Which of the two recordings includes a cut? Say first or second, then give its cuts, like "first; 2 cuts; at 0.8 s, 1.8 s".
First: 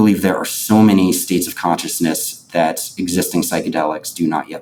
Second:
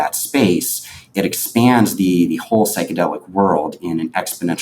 second; 1 cut; at 1.0 s